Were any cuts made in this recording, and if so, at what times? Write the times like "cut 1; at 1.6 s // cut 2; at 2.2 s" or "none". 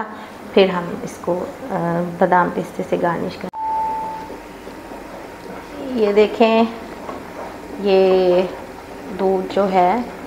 cut 1; at 3.5 s